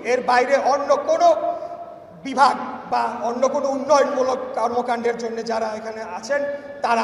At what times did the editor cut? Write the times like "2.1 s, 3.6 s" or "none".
none